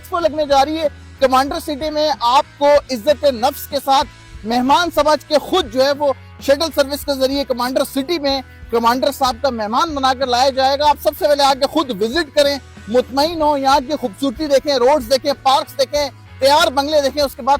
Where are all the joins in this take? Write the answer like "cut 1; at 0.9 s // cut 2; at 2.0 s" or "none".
none